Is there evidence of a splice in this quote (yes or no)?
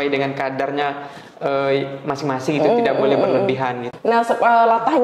yes